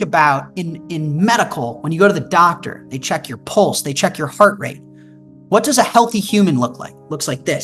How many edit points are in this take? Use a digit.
0